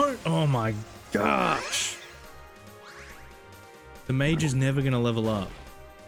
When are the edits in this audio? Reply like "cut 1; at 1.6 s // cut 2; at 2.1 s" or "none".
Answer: none